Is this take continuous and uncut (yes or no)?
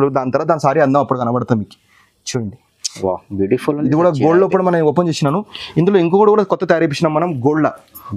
yes